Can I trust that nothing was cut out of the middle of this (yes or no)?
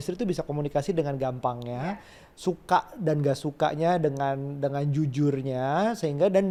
yes